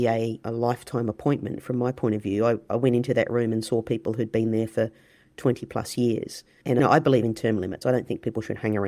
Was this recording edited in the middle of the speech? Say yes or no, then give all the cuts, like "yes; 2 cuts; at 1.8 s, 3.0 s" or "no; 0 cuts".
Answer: yes; 1 cut; at 6.8 s